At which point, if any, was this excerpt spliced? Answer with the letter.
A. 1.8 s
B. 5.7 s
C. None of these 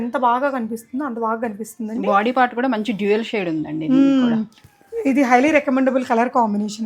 C